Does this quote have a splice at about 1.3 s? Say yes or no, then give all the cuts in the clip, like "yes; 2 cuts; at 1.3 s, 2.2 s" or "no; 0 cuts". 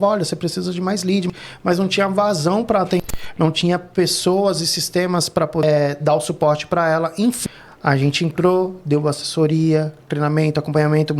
yes; 4 cuts; at 1.3 s, 3.0 s, 5.6 s, 7.4 s